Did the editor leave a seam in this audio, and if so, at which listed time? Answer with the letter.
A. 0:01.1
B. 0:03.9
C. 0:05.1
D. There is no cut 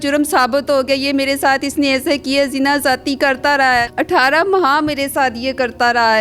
B